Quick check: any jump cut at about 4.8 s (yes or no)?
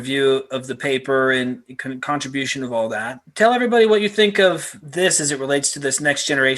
yes